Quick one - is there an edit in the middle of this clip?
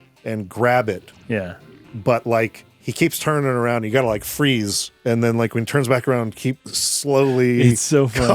yes; 2 cuts; at 4.8 s, 6.6 s

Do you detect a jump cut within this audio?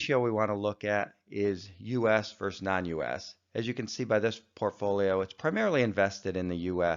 yes; 1 cut; at 2.1 s

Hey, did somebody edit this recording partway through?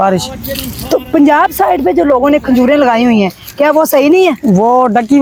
no; 0 cuts

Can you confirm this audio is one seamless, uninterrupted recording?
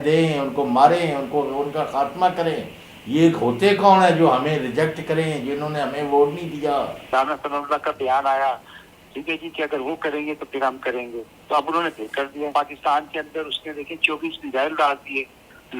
no; 2 cuts; at 7.1 s, 12.5 s

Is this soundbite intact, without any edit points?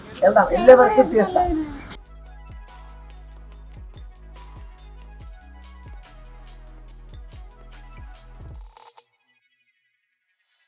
no; 1 cut; at 2.0 s

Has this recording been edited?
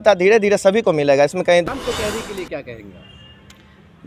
yes; 1 cut; at 1.6 s

